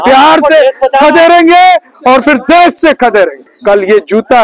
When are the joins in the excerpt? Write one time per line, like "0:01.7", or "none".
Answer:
0:03.5